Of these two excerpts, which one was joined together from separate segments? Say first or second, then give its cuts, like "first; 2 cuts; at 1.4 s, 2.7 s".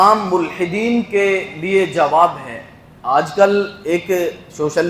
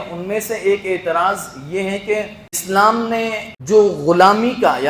second; 2 cuts; at 2.6 s, 3.5 s